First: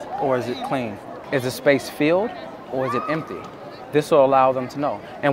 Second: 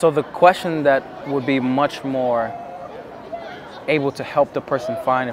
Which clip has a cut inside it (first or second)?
first